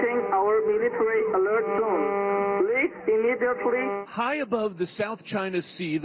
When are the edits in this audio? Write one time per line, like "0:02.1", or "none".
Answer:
0:02.0